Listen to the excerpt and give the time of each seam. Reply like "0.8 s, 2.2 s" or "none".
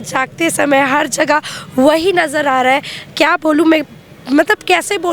none